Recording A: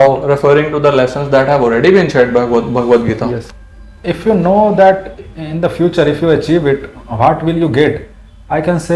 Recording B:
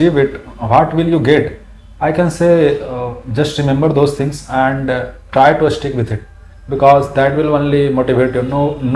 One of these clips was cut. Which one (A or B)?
A